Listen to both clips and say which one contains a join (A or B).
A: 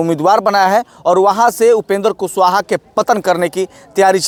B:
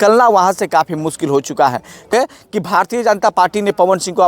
B